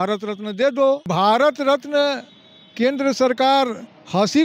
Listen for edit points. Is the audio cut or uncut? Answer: cut